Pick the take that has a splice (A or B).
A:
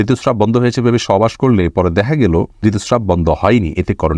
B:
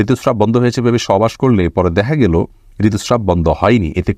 A